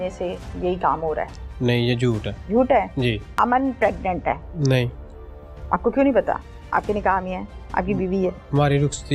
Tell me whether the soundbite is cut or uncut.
cut